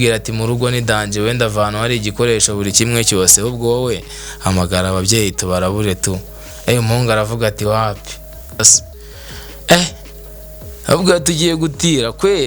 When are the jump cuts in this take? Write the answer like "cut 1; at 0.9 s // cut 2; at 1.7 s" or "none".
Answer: cut 1; at 8.7 s